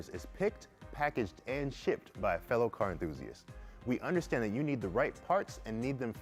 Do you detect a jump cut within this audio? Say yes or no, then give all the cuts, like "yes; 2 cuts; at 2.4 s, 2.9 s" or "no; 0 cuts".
no; 0 cuts